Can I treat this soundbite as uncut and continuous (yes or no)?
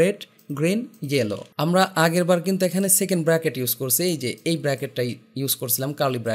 no